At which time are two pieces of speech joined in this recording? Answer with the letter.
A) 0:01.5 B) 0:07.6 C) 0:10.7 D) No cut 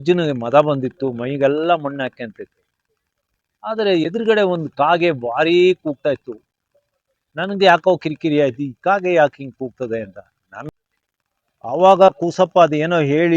C